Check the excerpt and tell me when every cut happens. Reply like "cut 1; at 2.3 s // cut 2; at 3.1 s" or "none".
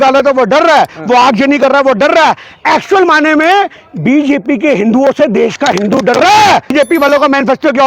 cut 1; at 6.7 s